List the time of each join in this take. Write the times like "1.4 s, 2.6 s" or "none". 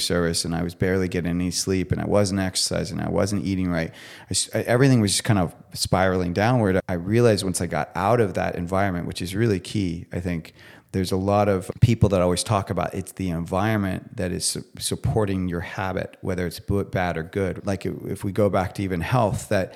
6.8 s, 11.6 s, 17.6 s